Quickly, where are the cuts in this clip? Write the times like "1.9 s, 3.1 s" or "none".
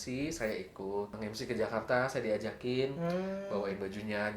1.1 s

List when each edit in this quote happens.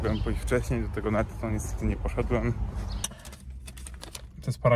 3.0 s

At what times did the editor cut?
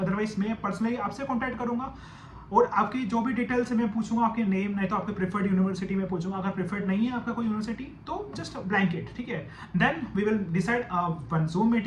none

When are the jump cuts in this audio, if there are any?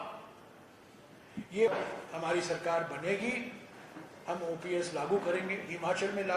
1.7 s

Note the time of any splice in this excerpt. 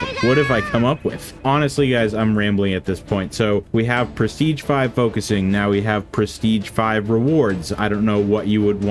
none

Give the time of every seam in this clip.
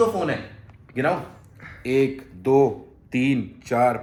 none

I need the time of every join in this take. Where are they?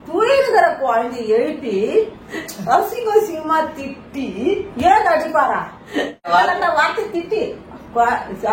6.3 s

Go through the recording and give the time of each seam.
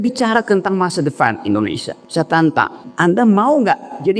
1.9 s, 2.8 s

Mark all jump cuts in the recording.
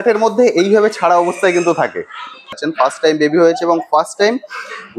2.6 s

